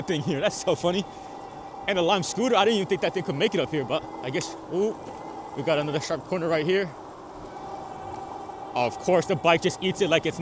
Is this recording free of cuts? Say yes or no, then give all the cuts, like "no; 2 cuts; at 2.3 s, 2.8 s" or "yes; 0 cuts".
yes; 0 cuts